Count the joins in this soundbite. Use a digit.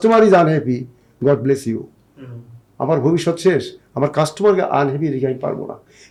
0